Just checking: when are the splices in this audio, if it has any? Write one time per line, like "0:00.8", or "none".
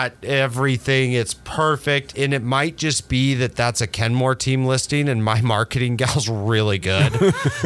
0:02.1